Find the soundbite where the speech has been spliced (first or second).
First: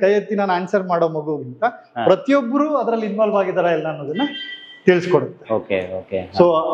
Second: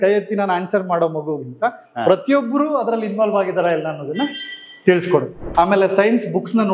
second